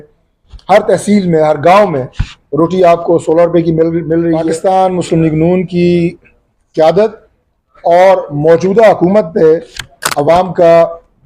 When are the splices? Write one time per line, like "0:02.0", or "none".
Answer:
0:04.5